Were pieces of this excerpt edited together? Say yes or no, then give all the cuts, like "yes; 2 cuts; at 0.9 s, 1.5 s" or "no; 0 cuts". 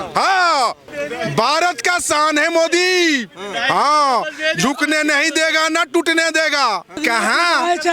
yes; 2 cuts; at 0.9 s, 7.0 s